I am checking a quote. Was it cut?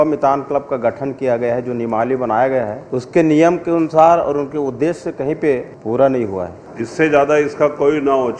yes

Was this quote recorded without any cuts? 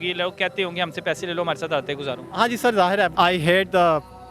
no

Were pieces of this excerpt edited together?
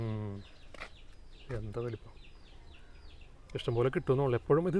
no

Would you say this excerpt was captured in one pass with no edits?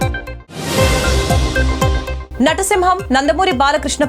yes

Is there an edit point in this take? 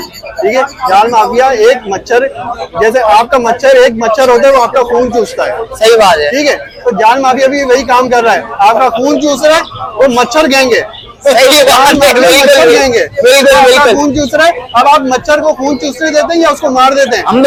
no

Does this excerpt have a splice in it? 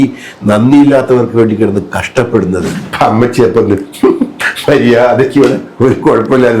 yes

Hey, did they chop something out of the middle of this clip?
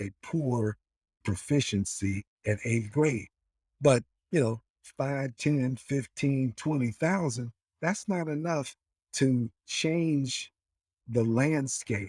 no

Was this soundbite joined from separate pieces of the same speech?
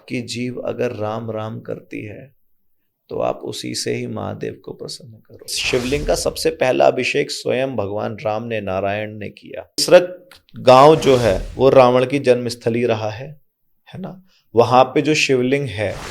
yes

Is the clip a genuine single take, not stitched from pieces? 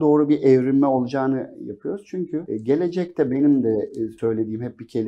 no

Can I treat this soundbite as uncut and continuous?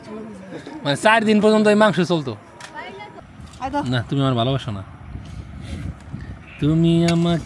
no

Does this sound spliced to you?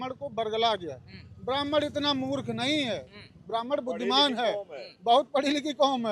no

